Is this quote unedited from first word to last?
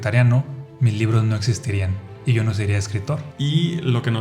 no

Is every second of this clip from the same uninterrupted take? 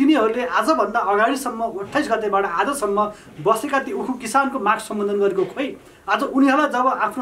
yes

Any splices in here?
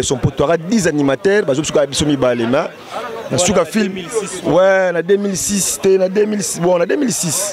no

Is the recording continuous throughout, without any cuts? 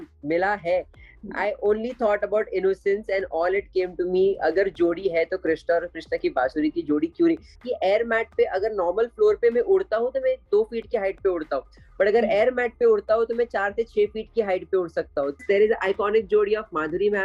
no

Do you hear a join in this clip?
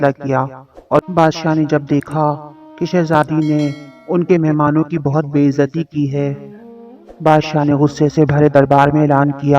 yes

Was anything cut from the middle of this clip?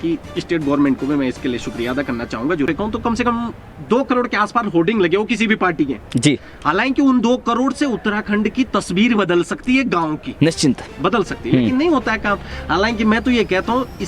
yes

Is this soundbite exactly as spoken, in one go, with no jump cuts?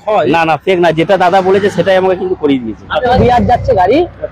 no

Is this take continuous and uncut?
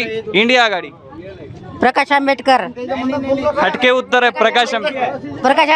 yes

